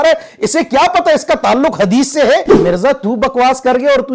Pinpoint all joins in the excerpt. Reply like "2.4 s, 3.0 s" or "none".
2.5 s